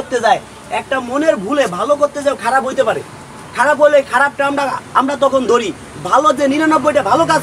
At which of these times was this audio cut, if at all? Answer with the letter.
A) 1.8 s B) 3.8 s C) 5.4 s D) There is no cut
D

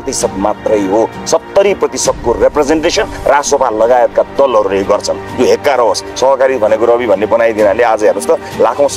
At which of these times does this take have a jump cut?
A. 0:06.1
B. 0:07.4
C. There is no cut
A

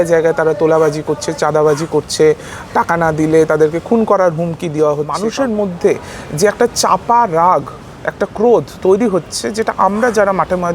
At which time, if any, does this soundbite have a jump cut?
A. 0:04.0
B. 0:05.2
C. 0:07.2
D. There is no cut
B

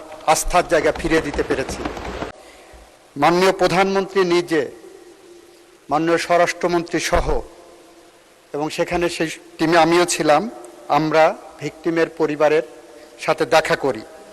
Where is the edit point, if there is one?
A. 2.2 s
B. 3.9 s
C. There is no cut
A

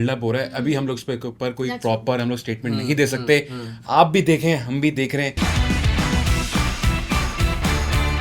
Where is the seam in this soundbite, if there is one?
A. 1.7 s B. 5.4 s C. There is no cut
B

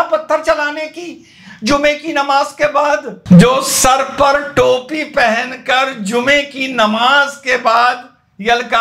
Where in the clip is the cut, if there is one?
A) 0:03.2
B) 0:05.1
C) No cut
A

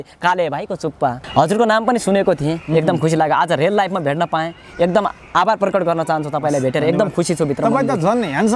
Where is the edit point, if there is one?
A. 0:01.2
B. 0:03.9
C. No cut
A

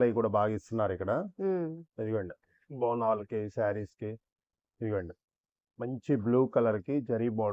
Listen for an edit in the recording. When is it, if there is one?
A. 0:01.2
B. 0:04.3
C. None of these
C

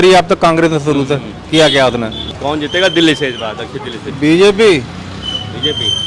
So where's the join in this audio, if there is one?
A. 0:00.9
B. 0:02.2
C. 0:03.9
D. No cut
B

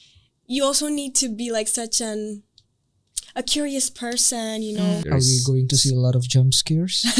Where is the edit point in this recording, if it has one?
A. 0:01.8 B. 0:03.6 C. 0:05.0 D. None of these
C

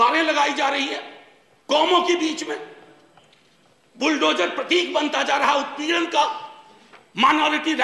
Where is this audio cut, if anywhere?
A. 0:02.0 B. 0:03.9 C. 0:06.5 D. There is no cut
D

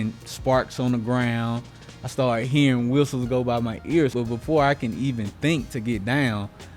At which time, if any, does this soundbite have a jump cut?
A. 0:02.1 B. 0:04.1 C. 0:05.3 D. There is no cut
B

